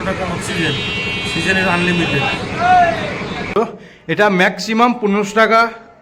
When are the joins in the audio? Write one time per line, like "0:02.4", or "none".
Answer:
0:03.5